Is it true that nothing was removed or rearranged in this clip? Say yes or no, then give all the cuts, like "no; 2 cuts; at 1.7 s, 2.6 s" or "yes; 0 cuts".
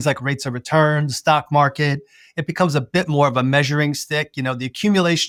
yes; 0 cuts